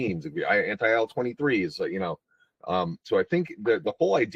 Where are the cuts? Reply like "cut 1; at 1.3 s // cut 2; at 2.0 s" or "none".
cut 1; at 3.0 s